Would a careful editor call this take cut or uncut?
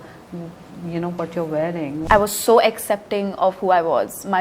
cut